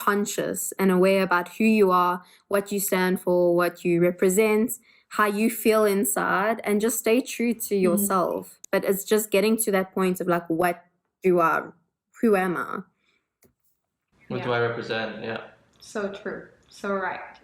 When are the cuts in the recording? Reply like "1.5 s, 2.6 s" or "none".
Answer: none